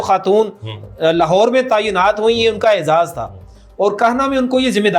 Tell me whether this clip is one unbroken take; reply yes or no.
yes